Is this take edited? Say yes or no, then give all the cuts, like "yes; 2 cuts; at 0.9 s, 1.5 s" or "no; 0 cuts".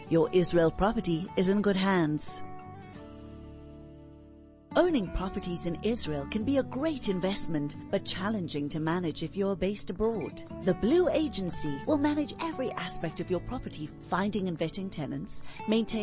yes; 2 cuts; at 2.2 s, 4.6 s